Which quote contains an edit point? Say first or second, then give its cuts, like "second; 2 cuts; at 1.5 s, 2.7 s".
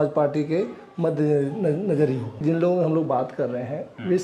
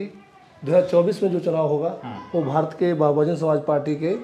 first; 1 cut; at 2.4 s